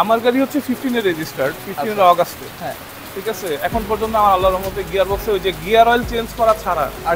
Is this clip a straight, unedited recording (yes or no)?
yes